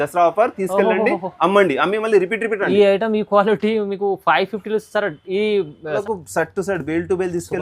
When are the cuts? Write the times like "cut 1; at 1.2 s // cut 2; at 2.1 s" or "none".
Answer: cut 1; at 6.0 s

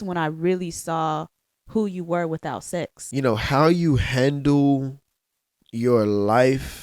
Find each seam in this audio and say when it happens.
cut 1; at 3.0 s

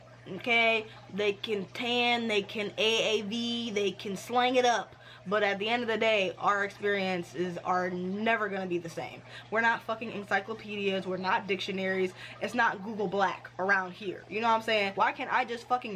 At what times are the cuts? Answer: cut 1; at 9.3 s // cut 2; at 14.9 s

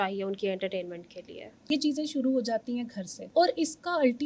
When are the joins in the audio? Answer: cut 1; at 1.6 s // cut 2; at 3.2 s

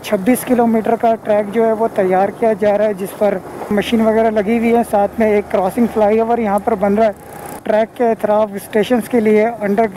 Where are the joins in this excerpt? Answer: cut 1; at 3.7 s // cut 2; at 7.6 s

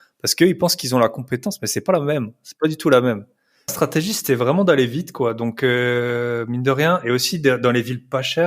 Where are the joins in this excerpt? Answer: cut 1; at 3.7 s

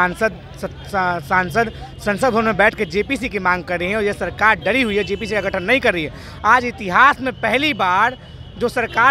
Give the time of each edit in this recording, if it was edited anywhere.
none

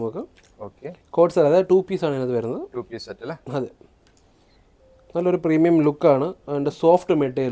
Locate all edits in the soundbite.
none

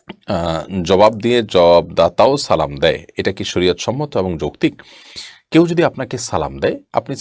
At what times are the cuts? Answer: none

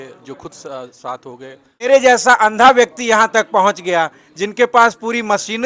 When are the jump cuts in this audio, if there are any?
cut 1; at 1.8 s

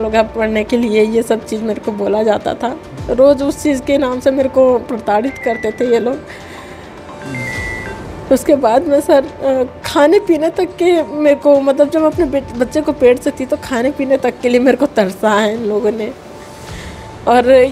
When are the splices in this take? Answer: none

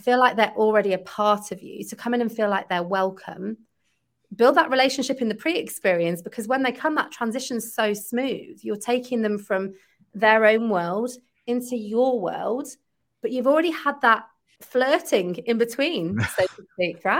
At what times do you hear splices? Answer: none

